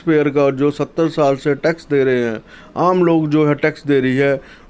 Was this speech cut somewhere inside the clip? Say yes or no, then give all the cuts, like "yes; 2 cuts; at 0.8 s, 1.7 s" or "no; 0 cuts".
no; 0 cuts